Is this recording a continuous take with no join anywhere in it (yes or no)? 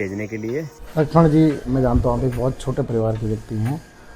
no